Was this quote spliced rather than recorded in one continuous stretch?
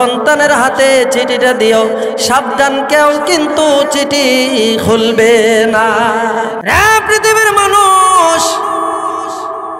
yes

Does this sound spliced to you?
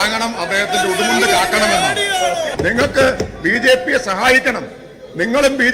yes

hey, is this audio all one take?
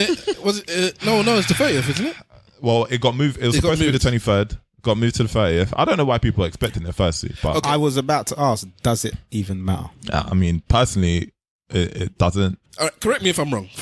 no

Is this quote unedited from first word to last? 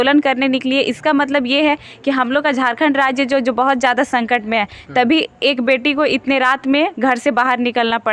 yes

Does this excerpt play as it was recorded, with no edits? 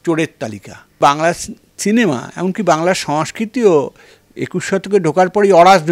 no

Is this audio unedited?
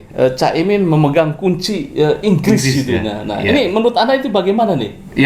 yes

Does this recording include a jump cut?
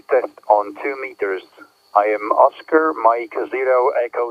no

